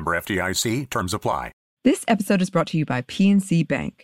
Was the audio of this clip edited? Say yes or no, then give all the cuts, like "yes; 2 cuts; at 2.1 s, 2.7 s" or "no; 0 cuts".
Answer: yes; 1 cut; at 1.6 s